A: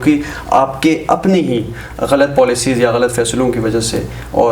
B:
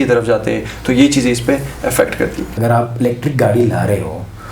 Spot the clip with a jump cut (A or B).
B